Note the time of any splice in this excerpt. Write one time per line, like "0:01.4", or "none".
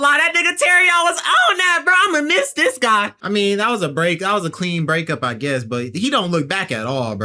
0:03.2